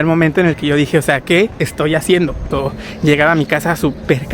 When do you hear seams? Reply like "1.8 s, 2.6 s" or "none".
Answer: 2.5 s